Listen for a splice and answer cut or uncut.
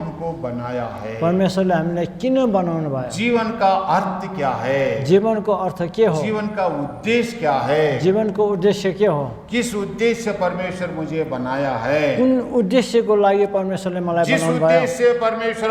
uncut